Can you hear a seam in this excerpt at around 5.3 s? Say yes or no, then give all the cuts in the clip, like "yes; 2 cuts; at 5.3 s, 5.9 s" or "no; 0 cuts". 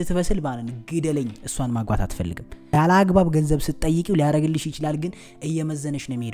no; 1 cut; at 2.6 s